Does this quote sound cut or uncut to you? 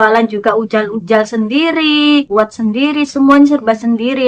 cut